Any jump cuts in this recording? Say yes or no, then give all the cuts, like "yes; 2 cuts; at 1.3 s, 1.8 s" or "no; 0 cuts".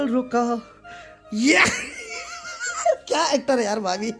no; 0 cuts